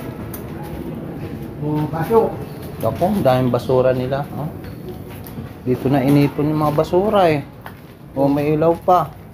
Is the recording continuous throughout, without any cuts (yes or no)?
yes